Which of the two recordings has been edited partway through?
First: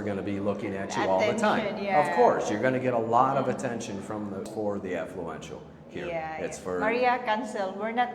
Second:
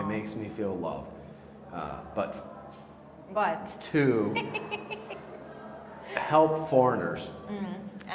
first; 1 cut; at 4.5 s

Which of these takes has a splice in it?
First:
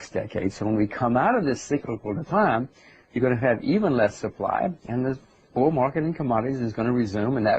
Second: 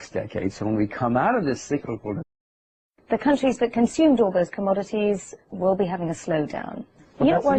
first; 1 cut; at 2.2 s

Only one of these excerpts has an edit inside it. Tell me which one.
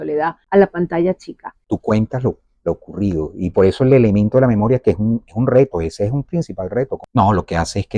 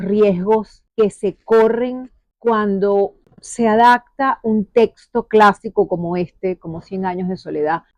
first; 2 cuts; at 1.6 s, 7.0 s

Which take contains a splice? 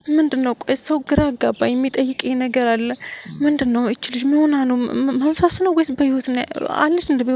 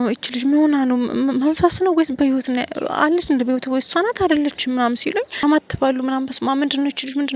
second; 1 cut; at 5.5 s

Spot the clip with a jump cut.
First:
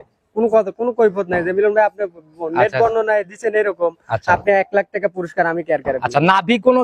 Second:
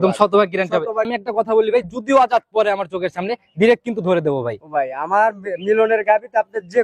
second; 1 cut; at 1.1 s

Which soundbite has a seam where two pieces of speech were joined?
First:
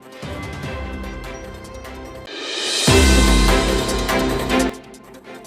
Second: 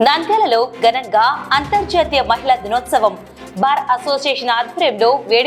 first; 1 cut; at 1.8 s

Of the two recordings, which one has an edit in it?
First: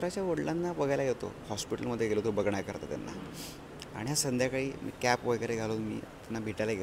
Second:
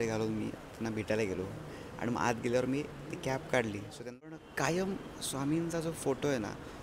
second; 1 cut; at 4.3 s

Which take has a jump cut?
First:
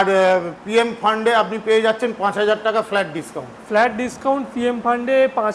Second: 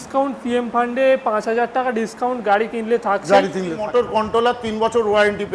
second; 1 cut; at 3.8 s

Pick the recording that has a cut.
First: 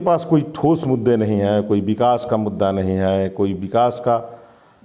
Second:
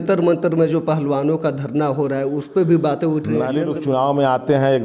second; 1 cut; at 3.6 s

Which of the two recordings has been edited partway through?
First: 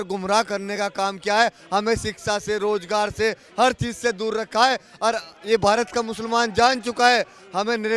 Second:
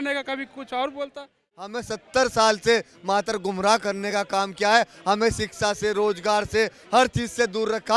second; 1 cut; at 1.5 s

